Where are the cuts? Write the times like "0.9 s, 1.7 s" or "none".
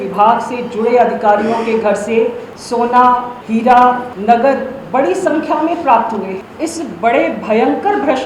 2.5 s, 3.3 s, 4.1 s, 6.4 s